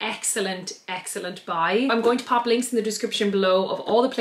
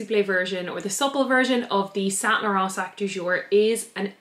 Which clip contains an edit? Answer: first; 1 cut; at 1.9 s

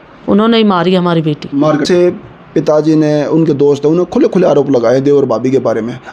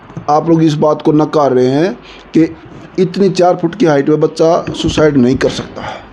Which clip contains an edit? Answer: first; 1 cut; at 1.8 s

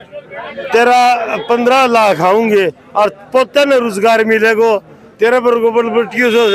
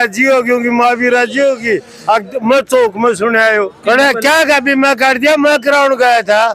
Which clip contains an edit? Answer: second; 1 cut; at 3.8 s

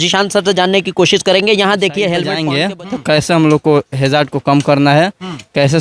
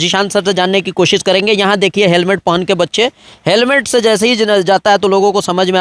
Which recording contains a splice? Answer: first; 1 cut; at 2.4 s

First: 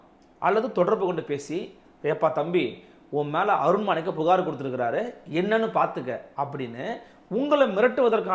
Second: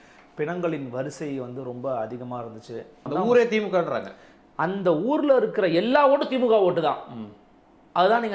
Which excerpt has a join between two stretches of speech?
second; 1 cut; at 3.1 s

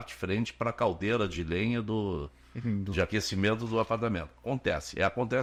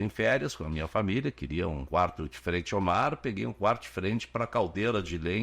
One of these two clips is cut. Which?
second; 1 cut; at 1.8 s

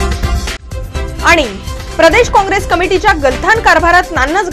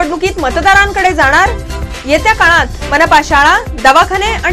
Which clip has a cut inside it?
first; 1 cut; at 1.0 s

